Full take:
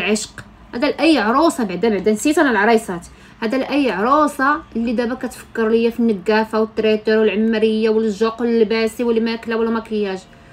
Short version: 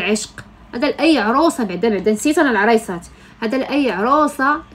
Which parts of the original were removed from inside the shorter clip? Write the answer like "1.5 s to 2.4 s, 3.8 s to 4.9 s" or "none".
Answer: none